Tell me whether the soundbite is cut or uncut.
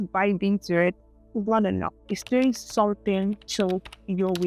uncut